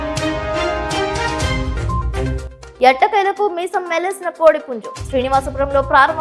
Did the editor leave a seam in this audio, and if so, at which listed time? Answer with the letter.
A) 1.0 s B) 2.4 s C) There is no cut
B